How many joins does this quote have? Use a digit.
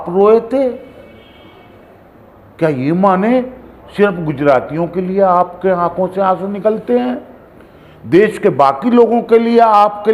0